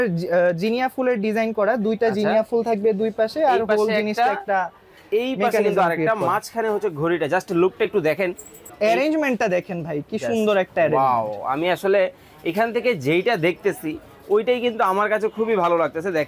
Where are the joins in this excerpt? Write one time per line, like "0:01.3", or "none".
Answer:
0:08.7